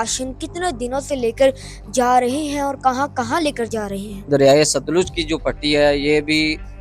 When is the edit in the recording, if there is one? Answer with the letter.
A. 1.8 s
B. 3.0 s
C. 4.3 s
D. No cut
C